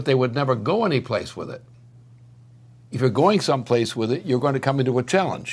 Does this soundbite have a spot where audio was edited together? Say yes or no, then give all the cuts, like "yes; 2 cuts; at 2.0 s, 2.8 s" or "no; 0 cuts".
no; 0 cuts